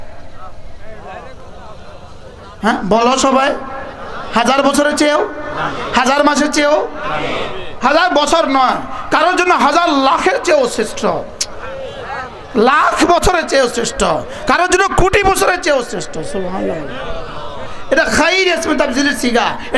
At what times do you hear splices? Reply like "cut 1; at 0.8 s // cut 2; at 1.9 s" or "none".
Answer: none